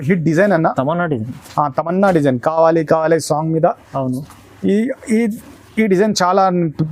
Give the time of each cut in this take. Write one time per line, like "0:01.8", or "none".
none